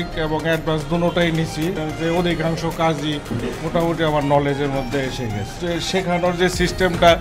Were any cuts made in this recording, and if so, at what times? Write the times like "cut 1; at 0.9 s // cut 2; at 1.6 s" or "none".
cut 1; at 1.8 s // cut 2; at 5.5 s